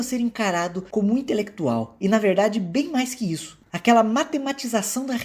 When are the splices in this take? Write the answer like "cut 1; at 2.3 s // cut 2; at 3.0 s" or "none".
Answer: cut 1; at 3.5 s